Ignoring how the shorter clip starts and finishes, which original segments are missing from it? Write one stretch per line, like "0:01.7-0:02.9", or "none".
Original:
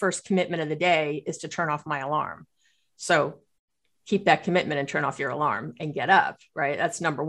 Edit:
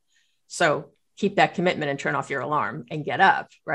0:03.5-0:03.9